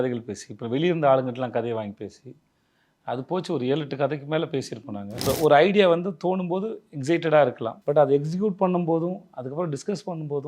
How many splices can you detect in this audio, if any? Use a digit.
2